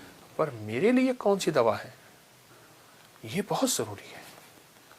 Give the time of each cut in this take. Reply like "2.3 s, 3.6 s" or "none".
none